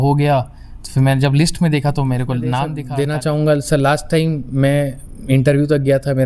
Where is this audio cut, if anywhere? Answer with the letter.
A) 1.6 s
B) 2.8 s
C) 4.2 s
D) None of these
B